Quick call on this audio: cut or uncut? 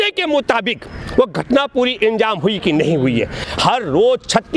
cut